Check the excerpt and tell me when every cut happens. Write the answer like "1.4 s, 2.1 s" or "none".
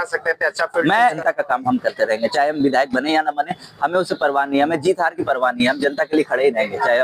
1.2 s

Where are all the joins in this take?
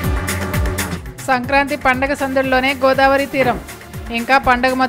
0.9 s

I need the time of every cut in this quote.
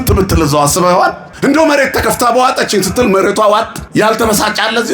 1.3 s, 3.8 s

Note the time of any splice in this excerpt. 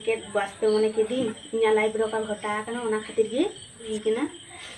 3.9 s

